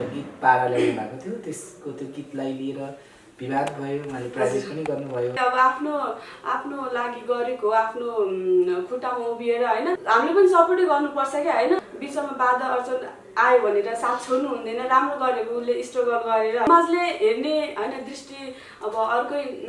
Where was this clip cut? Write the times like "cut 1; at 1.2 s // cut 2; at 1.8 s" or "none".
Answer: cut 1; at 5.4 s // cut 2; at 10.0 s // cut 3; at 11.9 s // cut 4; at 16.7 s